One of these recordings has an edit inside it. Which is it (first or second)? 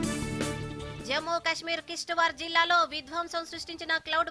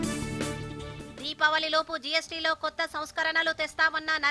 second